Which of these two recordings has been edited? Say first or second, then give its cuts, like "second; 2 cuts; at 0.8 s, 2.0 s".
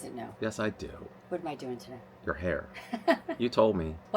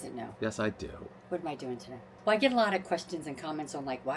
second; 1 cut; at 2.1 s